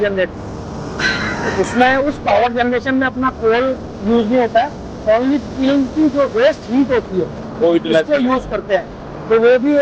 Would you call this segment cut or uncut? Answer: uncut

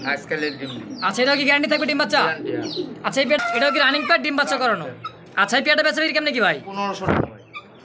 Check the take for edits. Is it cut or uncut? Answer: cut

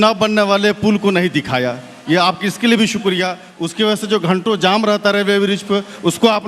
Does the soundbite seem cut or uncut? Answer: uncut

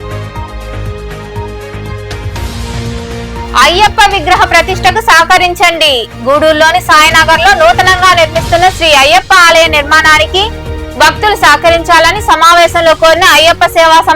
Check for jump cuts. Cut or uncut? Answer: cut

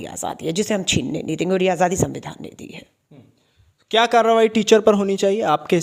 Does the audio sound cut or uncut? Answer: uncut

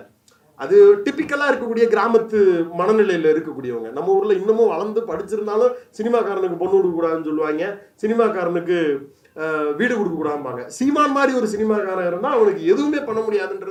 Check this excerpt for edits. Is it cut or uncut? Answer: uncut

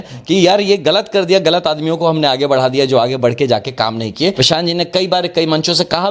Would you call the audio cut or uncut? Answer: cut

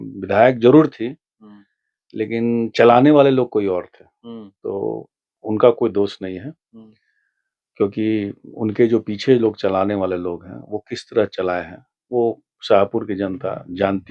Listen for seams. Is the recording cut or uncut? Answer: uncut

